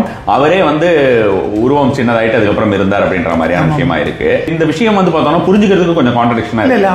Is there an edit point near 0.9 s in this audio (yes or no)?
no